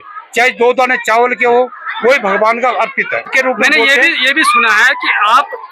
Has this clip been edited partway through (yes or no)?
yes